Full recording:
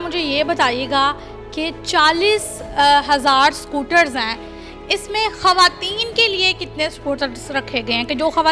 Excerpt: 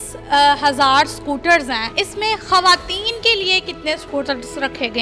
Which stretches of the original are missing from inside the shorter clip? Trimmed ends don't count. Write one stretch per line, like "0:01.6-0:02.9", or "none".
0:04.3-0:04.8